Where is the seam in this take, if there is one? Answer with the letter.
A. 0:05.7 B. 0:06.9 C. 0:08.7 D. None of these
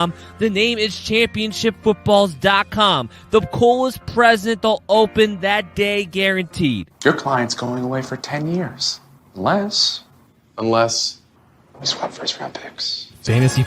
B